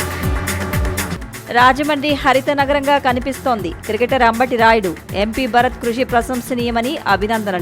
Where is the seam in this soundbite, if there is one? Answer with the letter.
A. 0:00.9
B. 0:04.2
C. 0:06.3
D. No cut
A